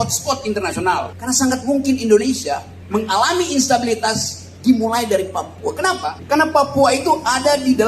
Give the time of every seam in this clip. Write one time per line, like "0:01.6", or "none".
0:01.1
0:02.7
0:06.2